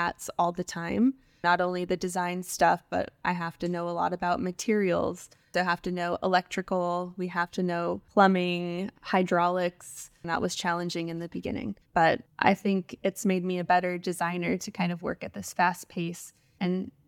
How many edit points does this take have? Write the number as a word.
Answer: two